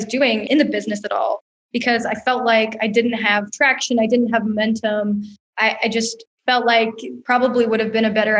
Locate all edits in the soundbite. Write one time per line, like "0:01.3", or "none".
0:07.2